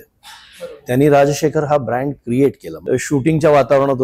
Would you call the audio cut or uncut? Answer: cut